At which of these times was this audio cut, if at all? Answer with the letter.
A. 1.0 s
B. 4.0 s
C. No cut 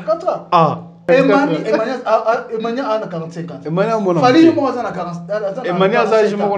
A